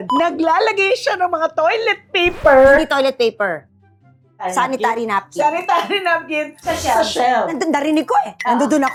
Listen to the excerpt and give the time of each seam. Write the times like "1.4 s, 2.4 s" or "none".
none